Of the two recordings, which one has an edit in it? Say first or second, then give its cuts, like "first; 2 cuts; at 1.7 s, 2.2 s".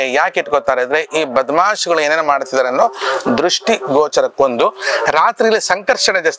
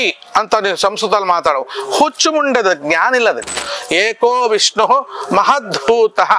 second; 1 cut; at 3.7 s